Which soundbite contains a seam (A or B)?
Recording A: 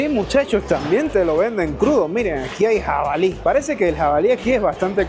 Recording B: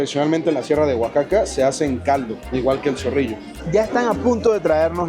B